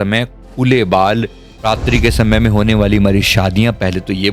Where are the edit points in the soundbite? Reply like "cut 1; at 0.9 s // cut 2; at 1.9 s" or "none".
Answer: cut 1; at 1.4 s